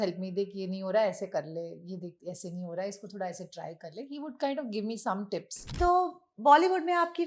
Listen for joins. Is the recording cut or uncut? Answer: cut